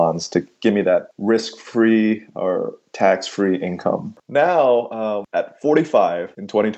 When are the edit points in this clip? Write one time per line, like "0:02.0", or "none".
0:04.2